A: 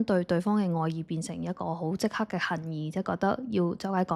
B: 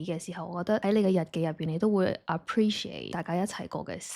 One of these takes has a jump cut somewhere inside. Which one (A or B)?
B